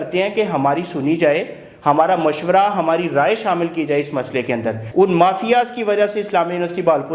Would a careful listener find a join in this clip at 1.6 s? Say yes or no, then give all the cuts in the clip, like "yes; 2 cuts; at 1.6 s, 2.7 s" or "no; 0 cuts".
no; 1 cut; at 4.8 s